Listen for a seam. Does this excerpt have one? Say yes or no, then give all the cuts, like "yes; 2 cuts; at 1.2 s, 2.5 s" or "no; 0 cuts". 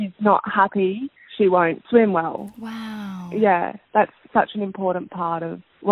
no; 0 cuts